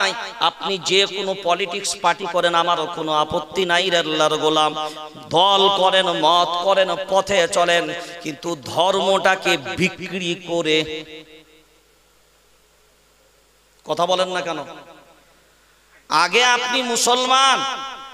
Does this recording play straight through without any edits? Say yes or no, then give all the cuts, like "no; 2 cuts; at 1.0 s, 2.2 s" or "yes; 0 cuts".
yes; 0 cuts